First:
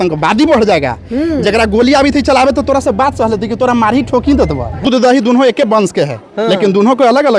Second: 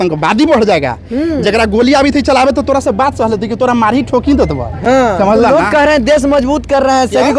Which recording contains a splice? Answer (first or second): first